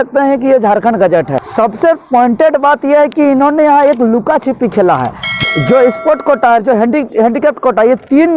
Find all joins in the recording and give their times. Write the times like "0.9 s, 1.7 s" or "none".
1.4 s, 5.3 s